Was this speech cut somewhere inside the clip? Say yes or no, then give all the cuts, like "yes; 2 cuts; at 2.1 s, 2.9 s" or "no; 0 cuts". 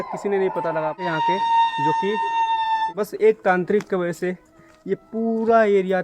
yes; 2 cuts; at 1.0 s, 2.9 s